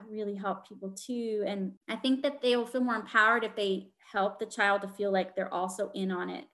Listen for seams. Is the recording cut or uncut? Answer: cut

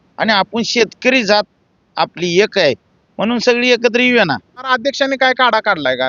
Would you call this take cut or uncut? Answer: cut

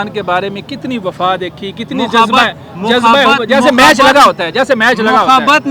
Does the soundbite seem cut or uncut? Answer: uncut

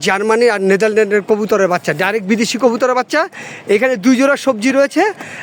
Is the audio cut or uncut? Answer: uncut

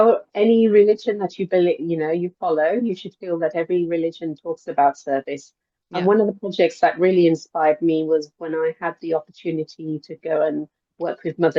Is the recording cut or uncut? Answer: uncut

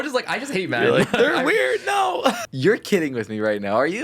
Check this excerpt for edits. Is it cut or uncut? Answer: cut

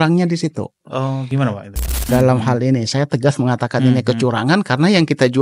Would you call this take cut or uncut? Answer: cut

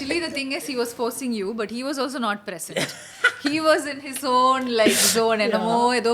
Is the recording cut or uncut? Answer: uncut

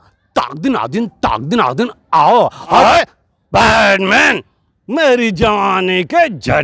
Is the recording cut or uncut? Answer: cut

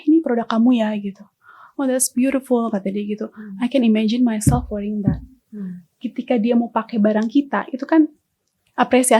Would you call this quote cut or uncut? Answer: uncut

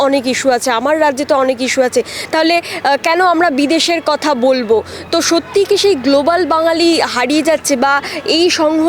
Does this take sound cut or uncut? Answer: uncut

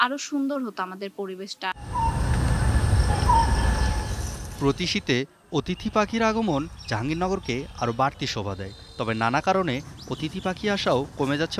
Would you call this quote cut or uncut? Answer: uncut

